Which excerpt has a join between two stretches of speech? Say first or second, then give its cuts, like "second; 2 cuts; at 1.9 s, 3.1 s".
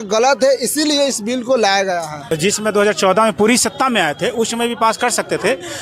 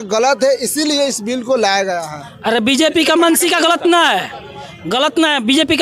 first; 1 cut; at 2.2 s